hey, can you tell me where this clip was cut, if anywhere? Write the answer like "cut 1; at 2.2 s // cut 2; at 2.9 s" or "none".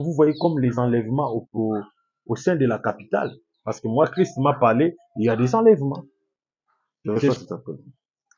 cut 1; at 7.3 s

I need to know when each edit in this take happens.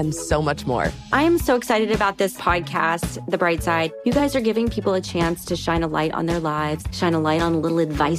none

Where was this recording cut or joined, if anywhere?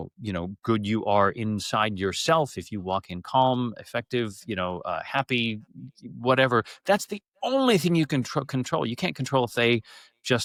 none

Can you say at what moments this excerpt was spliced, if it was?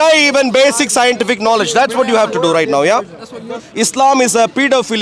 cut 1; at 3.6 s

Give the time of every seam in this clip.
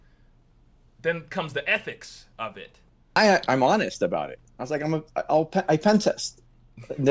cut 1; at 3.2 s

